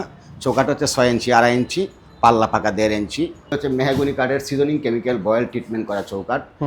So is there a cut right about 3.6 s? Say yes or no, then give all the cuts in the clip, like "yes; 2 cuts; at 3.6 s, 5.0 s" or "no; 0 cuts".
yes; 1 cut; at 3.6 s